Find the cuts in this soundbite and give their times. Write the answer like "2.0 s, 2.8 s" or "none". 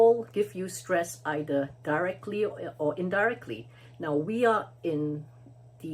none

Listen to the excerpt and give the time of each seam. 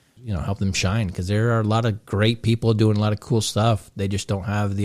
none

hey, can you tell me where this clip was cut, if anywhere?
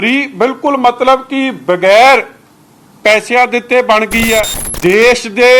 4.6 s

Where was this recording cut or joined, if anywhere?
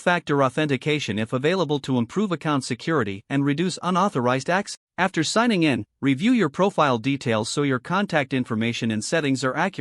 4.7 s

